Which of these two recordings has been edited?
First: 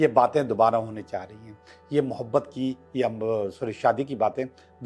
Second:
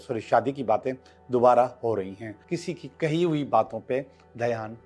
second; 1 cut; at 2.4 s

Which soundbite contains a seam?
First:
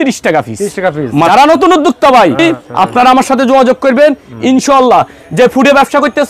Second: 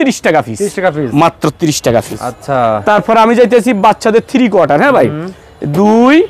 first; 2 cuts; at 1.3 s, 2.4 s

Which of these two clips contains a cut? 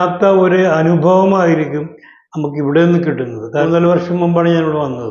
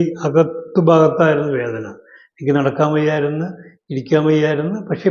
first; 1 cut; at 3.4 s

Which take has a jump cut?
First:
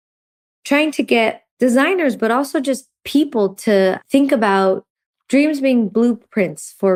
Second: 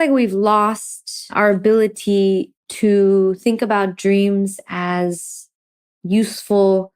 second; 1 cut; at 1.3 s

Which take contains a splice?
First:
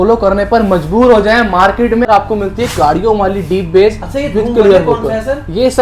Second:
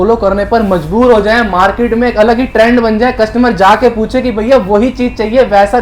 first; 1 cut; at 2.1 s

